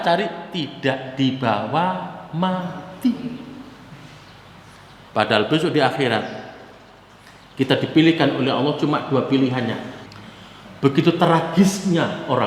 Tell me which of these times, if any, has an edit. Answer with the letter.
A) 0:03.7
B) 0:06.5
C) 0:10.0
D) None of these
C